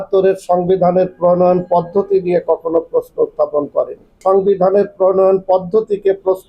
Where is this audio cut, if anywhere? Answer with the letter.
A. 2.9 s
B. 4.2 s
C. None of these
B